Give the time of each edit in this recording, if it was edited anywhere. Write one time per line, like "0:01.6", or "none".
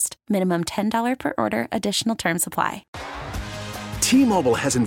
0:02.8